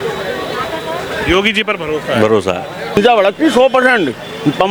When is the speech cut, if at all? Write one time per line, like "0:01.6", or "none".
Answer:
0:03.0